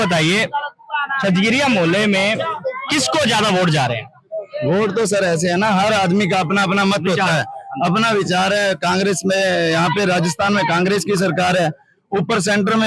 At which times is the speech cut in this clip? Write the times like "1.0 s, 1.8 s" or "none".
none